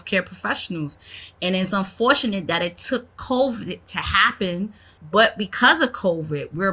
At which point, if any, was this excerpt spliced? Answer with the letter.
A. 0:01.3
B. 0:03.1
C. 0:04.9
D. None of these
C